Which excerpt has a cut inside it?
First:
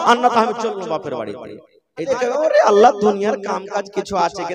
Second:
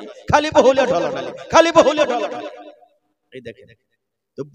first; 1 cut; at 2.1 s

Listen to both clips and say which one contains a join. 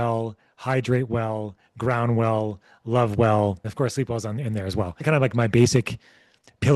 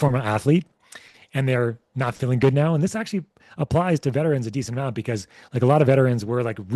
first; 2 cuts; at 3.7 s, 5.0 s

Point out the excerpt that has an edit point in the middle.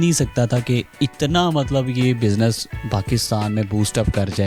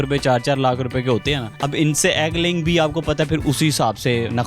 second; 1 cut; at 1.5 s

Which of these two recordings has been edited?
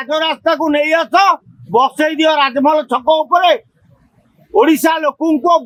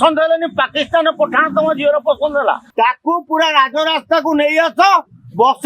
second; 1 cut; at 2.7 s

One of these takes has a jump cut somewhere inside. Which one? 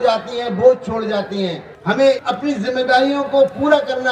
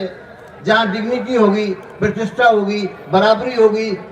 first; 2 cuts; at 1.7 s, 2.2 s

